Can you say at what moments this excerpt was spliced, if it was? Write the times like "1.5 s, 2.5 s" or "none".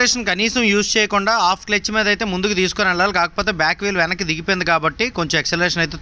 none